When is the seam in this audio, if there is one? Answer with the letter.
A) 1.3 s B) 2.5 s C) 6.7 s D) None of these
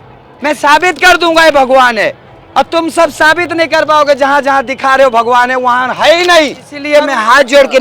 C